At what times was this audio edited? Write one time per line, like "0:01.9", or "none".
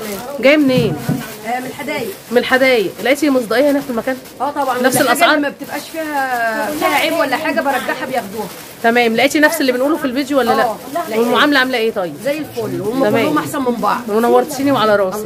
none